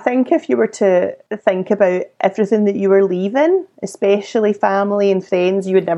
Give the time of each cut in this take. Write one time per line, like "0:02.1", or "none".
0:01.2